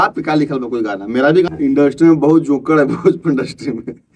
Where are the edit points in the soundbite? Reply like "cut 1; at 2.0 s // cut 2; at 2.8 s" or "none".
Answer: cut 1; at 1.5 s